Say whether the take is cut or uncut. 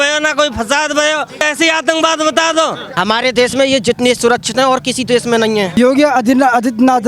cut